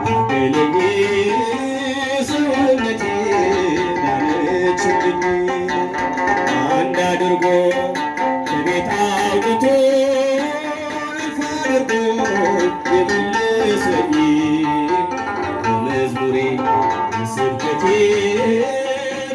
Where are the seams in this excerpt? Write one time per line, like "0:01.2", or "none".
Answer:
none